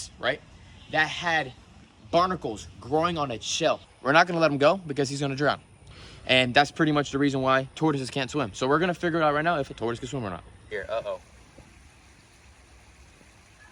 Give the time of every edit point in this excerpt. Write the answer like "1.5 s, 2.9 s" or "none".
3.9 s, 10.5 s

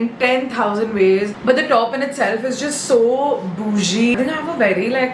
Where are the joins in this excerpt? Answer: 1.3 s, 4.1 s

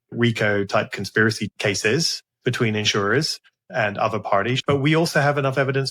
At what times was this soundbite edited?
1.5 s, 3.6 s, 4.6 s

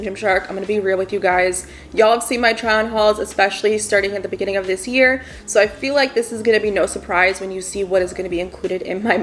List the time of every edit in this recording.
none

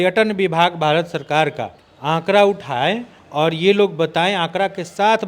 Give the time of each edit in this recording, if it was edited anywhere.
none

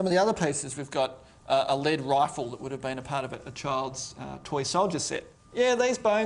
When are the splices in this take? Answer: 5.4 s

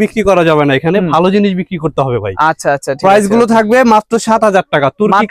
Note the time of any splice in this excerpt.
none

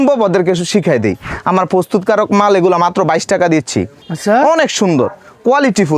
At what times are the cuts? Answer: 1.3 s, 4.0 s

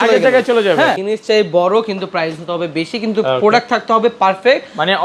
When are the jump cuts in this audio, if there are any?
1.0 s

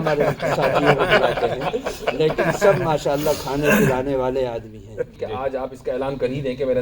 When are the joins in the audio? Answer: 5.2 s

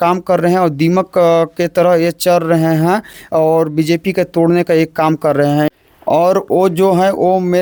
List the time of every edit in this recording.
none

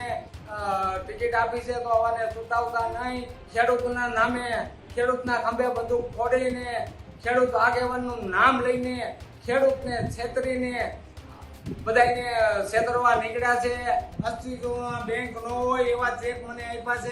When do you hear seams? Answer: 3.4 s, 14.1 s

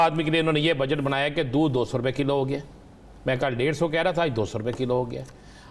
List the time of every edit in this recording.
none

